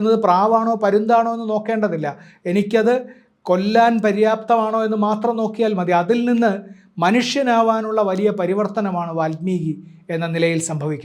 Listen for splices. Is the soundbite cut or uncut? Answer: uncut